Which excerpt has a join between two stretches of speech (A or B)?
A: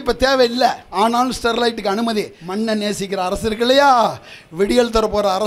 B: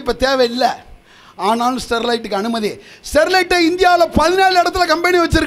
A